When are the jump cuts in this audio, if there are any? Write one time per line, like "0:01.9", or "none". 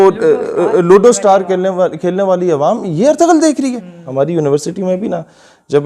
0:04.0